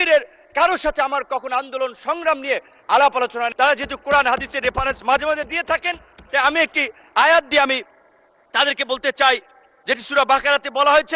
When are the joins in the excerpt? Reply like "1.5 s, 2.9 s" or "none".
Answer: 3.5 s